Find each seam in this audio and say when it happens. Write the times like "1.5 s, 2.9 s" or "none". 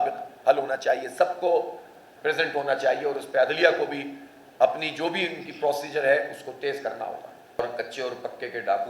7.6 s